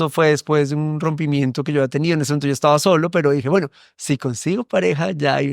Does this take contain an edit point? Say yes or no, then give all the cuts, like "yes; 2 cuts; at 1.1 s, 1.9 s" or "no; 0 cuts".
no; 0 cuts